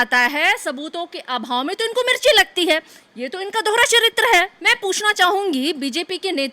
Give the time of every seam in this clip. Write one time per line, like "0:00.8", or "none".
0:04.6